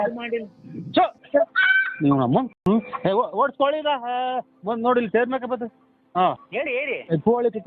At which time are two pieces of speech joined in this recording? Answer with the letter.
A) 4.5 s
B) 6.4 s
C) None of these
B